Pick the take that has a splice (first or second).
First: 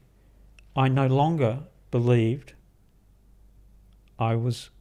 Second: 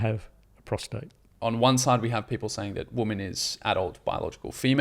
second